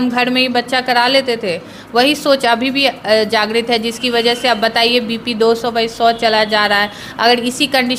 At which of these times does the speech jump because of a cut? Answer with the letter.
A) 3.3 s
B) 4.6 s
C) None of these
C